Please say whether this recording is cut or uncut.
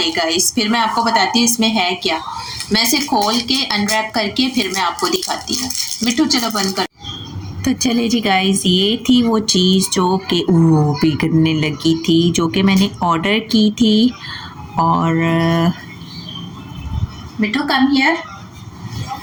uncut